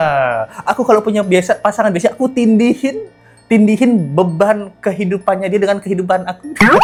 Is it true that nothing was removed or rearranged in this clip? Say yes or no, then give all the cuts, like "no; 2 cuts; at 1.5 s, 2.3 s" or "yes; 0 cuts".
yes; 0 cuts